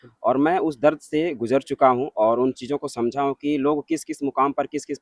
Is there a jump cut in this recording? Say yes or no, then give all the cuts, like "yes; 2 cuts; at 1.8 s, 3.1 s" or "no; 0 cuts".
no; 0 cuts